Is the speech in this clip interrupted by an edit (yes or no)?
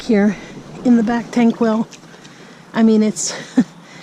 no